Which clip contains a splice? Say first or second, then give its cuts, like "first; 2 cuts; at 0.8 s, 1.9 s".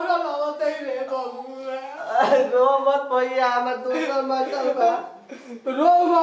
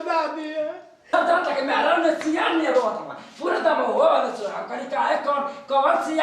second; 1 cut; at 1.1 s